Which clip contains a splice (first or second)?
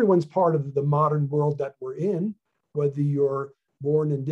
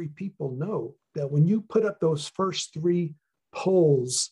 second